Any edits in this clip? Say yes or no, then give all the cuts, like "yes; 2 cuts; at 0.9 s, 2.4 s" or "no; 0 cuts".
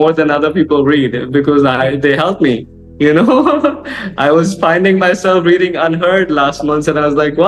no; 0 cuts